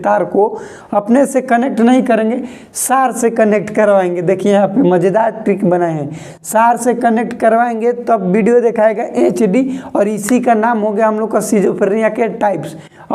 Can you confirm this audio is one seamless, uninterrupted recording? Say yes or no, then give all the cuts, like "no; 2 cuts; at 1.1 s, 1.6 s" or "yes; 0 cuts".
yes; 0 cuts